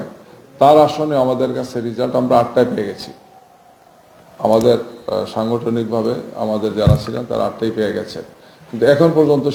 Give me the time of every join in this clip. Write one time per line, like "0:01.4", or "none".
none